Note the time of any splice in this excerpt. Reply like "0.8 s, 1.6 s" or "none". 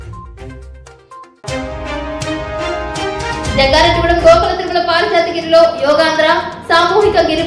3.2 s